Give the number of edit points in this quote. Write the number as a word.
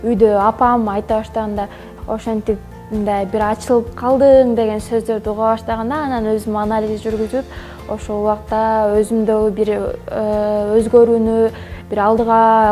one